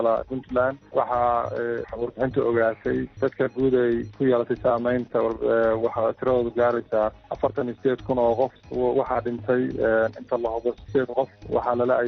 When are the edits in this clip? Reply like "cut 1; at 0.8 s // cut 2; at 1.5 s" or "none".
cut 1; at 0.8 s // cut 2; at 8.6 s